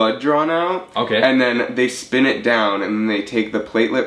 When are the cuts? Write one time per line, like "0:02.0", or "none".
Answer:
none

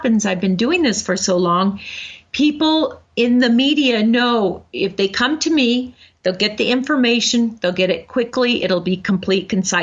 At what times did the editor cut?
none

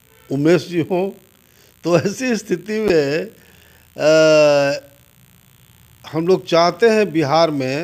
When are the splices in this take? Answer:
none

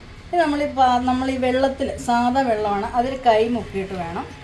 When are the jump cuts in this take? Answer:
none

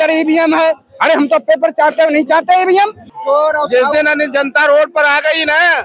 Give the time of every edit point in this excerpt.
0:03.1

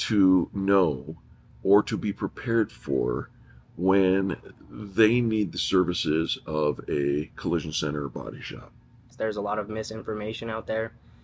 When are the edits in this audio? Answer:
0:09.1

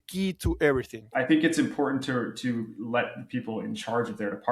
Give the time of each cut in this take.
0:01.0

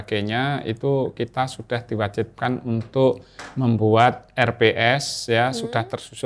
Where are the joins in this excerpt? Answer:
none

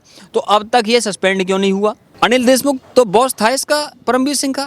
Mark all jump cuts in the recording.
0:02.1

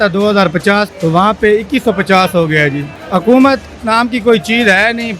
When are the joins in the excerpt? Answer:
0:00.9
0:02.9

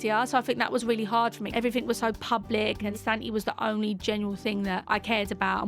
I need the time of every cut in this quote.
0:01.4
0:02.9
0:04.8

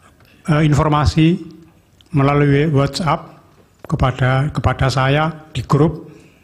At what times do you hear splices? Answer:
0:03.6

